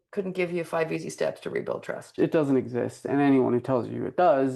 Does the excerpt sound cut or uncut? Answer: cut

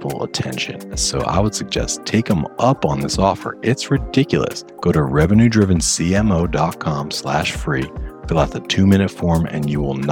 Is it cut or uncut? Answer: cut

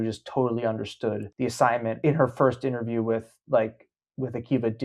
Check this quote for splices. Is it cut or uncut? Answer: cut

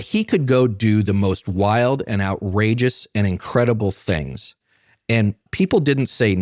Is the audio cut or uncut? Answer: cut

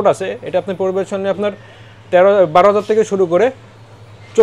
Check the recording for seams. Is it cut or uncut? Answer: uncut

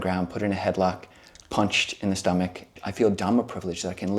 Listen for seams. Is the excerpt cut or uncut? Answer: cut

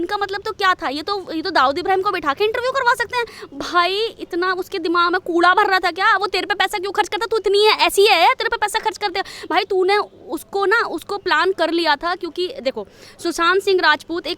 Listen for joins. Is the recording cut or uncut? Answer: cut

